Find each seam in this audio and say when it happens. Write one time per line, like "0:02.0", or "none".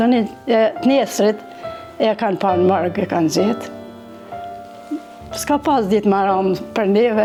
none